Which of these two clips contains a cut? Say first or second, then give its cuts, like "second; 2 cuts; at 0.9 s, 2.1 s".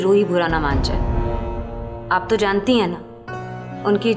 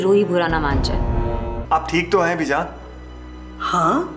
second; 1 cut; at 1.5 s